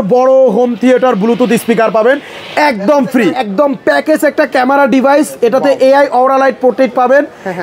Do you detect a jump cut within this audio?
yes; 1 cut; at 3.4 s

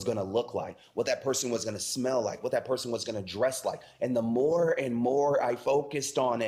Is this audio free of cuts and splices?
yes; 0 cuts

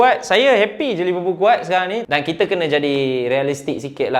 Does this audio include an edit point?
yes; 1 cut; at 2.0 s

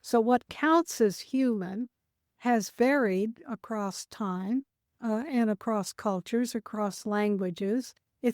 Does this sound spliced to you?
yes; 2 cuts; at 2.3 s, 4.8 s

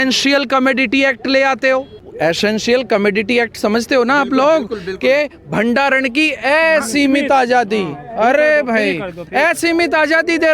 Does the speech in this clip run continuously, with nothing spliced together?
no; 1 cut; at 2.0 s

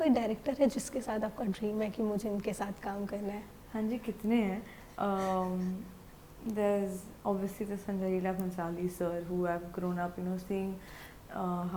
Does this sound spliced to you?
no; 0 cuts

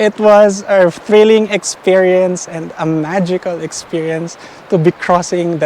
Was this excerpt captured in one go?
yes; 0 cuts

